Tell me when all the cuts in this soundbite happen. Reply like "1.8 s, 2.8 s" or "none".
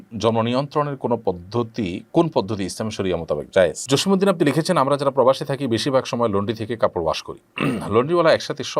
3.8 s